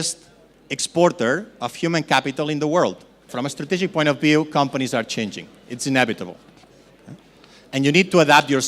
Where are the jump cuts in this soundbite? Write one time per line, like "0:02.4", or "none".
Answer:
0:03.3